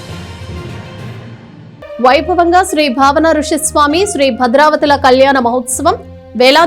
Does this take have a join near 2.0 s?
no; 0 cuts

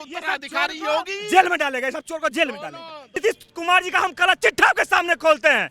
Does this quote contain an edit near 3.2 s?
yes; 1 cut; at 3.2 s

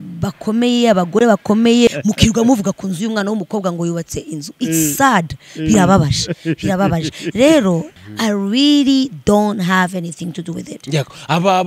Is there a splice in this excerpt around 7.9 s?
yes; 2 cuts; at 1.9 s, 7.9 s

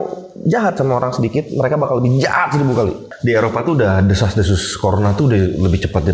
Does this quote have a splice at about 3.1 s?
yes; 1 cut; at 3.1 s

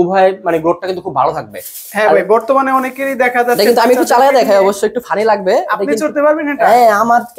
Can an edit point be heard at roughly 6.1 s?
no; 0 cuts

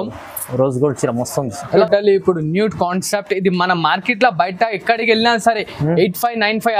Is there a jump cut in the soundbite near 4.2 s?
no; 1 cut; at 1.7 s

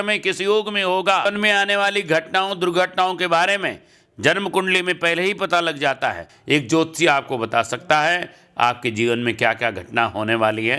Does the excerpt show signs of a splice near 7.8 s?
no; 2 cuts; at 1.2 s, 6.3 s

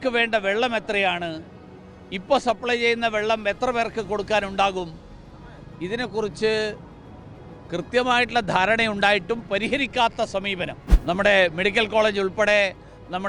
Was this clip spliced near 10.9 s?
yes; 1 cut; at 10.9 s

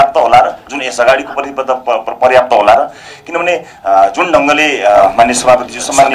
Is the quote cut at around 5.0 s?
yes; 1 cut; at 5.0 s

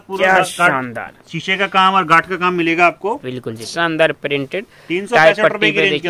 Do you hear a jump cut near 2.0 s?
no; 1 cut; at 3.7 s

